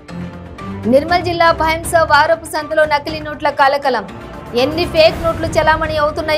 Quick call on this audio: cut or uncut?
uncut